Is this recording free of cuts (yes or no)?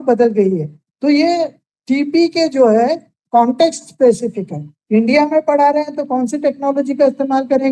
yes